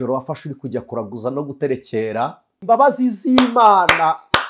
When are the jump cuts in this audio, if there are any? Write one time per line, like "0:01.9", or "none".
0:02.7